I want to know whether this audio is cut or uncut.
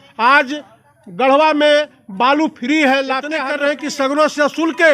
cut